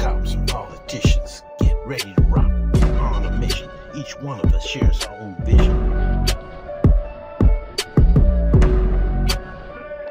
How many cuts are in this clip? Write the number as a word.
zero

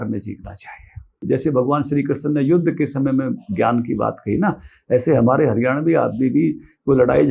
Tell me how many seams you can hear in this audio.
one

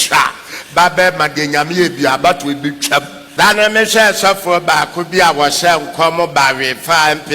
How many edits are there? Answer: one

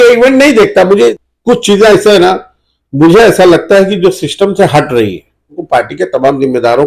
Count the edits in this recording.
two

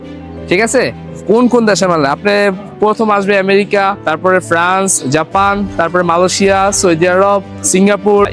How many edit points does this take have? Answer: two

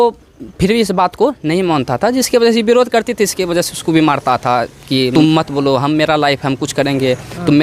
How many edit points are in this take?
one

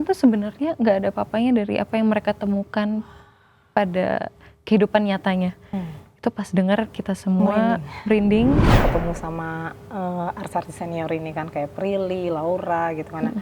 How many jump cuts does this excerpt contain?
one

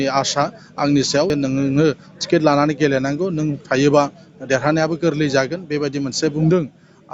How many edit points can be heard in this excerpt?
one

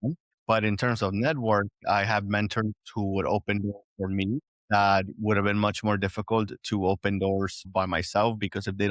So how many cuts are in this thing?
one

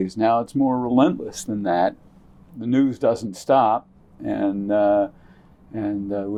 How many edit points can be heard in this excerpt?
zero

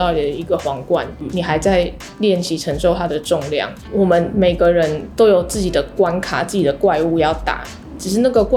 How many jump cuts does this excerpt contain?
two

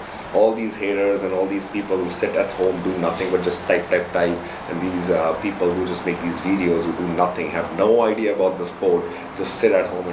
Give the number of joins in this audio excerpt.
one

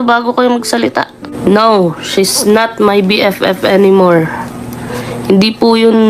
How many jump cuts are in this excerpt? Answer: one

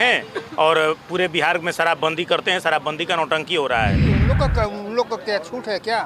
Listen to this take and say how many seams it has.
one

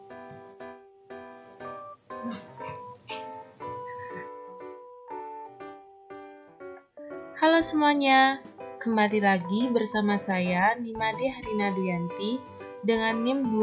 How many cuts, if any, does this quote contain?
zero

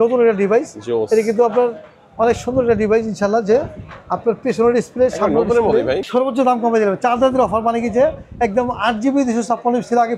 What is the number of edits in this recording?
one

